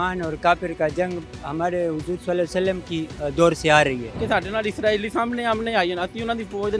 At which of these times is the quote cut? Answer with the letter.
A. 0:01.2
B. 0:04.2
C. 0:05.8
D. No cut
B